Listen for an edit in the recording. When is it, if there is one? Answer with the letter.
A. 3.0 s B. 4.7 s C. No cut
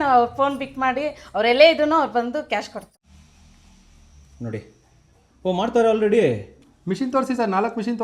A